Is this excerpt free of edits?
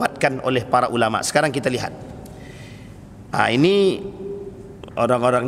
yes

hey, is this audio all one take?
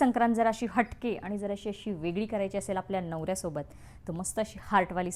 yes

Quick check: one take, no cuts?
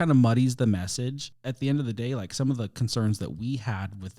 no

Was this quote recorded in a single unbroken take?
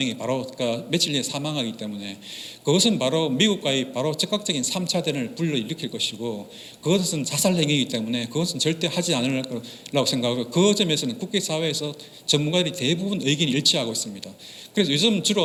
yes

